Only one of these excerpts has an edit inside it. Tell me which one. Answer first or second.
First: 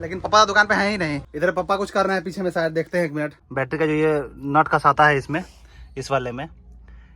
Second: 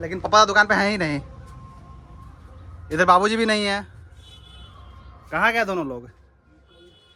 first